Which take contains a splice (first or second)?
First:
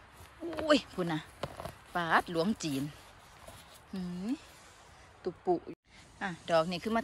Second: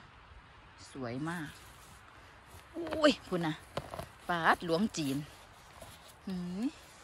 first